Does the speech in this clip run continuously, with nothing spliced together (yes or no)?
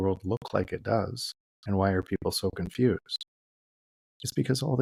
yes